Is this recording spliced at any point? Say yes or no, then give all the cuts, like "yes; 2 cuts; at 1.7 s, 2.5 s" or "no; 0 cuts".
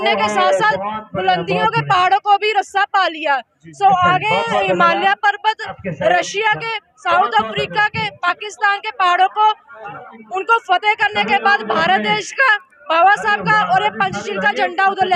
no; 0 cuts